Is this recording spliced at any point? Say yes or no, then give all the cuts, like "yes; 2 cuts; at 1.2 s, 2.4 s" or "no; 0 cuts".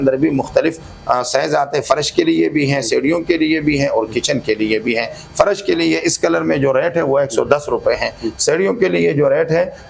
no; 0 cuts